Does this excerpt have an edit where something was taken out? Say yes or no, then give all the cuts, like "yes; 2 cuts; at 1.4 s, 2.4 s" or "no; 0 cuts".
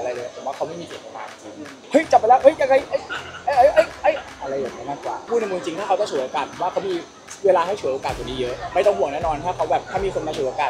yes; 3 cuts; at 1.8 s, 5.3 s, 8.7 s